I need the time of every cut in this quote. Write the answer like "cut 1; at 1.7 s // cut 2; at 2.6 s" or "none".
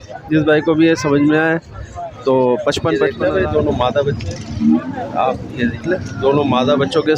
cut 1; at 3.1 s